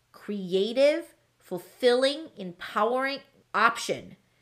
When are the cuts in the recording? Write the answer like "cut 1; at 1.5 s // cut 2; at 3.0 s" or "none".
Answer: cut 1; at 3.4 s